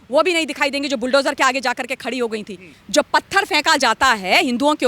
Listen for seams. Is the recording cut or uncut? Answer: cut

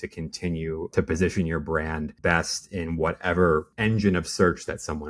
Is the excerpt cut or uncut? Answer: cut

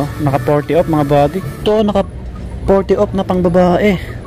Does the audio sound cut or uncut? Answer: cut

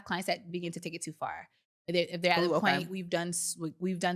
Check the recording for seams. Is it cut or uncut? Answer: uncut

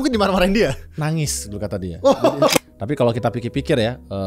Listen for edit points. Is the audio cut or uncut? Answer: cut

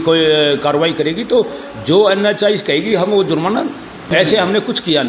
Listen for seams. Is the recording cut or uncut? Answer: cut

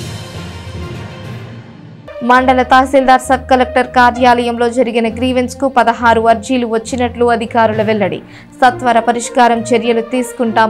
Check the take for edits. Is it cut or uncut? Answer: cut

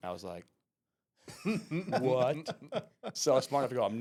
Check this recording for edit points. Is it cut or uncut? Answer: uncut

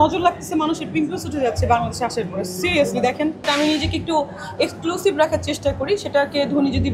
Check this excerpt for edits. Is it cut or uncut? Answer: cut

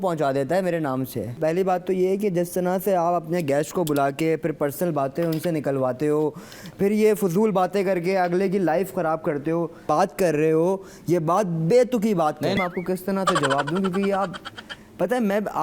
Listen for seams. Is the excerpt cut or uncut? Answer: cut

